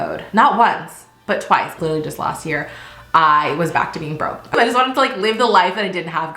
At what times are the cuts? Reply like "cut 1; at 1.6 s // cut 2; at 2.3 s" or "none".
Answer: cut 1; at 1.7 s // cut 2; at 4.5 s

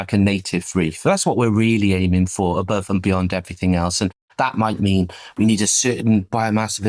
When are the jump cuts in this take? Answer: none

